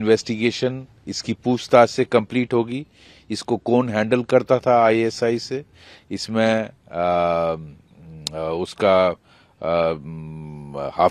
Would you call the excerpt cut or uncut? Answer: uncut